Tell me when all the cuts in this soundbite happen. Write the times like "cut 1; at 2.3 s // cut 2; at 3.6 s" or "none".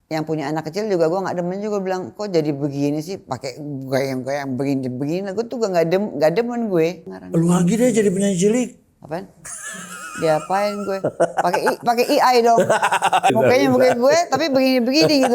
cut 1; at 7.1 s // cut 2; at 13.3 s